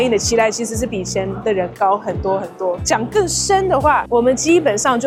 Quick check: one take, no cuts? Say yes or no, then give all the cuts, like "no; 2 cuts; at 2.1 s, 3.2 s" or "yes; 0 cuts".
yes; 0 cuts